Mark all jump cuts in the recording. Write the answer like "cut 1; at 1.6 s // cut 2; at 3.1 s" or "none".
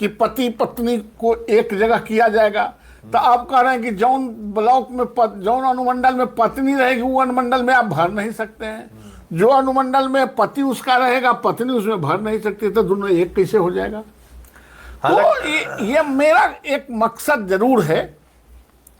cut 1; at 1.1 s

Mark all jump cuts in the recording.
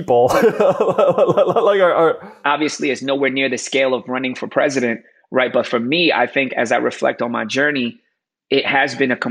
cut 1; at 2.3 s

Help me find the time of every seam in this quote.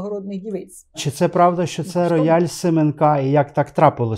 cut 1; at 1.1 s

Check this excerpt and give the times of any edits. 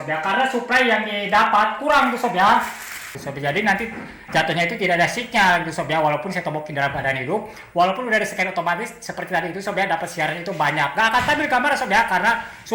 cut 1; at 3.2 s

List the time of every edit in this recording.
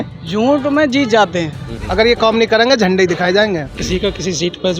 cut 1; at 1.7 s // cut 2; at 3.8 s

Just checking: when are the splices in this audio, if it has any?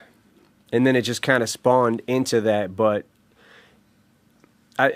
none

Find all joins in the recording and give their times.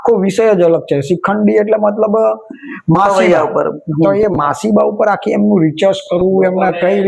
none

